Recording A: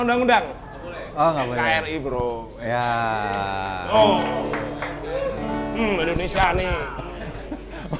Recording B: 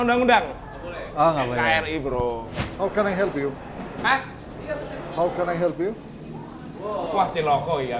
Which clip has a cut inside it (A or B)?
B